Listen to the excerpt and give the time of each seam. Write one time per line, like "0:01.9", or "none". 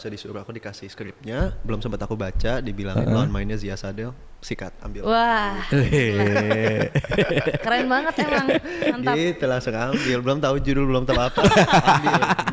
none